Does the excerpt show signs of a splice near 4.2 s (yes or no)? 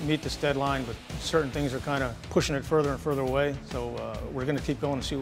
no